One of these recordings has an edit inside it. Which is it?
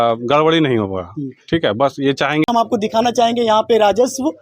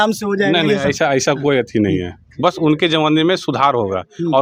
first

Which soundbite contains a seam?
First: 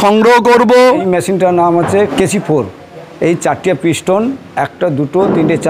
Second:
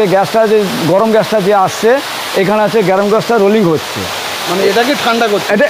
first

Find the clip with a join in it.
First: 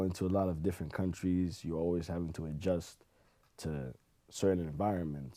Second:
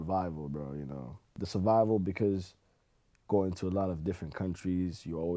second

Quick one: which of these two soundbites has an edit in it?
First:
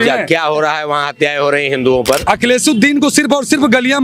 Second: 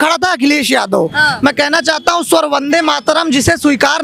first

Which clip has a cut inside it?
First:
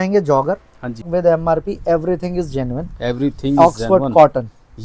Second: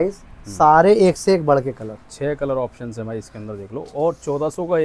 first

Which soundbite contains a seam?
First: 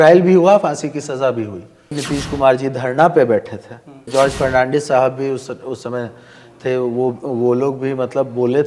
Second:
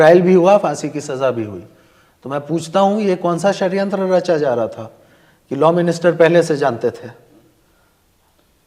first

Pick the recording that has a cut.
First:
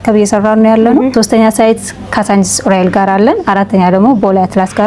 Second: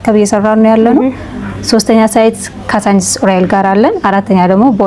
first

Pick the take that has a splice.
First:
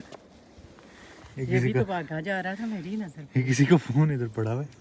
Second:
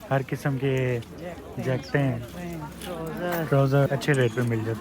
second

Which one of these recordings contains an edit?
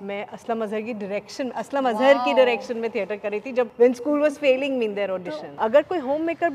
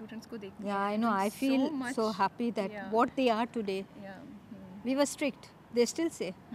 first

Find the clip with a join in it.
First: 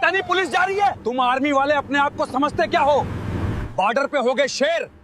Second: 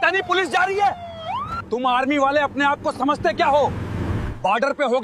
first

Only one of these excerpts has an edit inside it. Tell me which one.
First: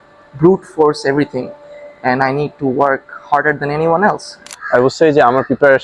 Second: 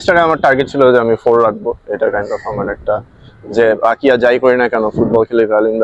first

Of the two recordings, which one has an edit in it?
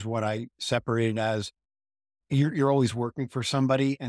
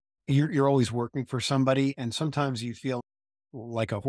second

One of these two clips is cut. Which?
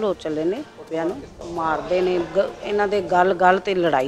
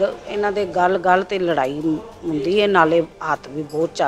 first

